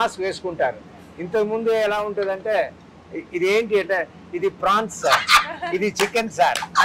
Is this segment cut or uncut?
uncut